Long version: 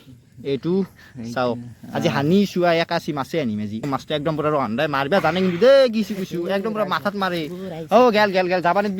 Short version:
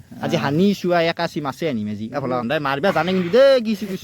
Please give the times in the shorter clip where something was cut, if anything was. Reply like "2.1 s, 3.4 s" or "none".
2.4 s